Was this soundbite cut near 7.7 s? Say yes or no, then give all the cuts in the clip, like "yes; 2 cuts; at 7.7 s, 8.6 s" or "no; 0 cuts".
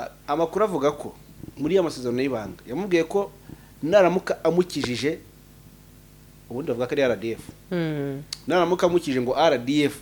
no; 0 cuts